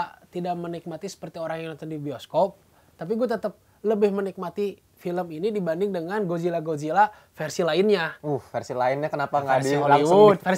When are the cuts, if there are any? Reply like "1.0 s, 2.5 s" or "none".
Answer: none